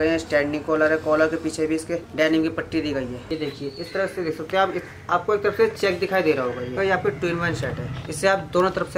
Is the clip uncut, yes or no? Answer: no